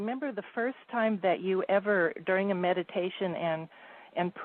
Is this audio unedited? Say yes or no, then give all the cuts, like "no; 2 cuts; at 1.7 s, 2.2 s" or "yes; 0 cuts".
no; 1 cut; at 2.8 s